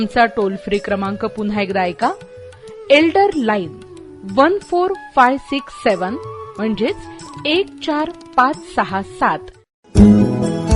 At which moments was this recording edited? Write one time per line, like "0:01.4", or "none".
0:09.7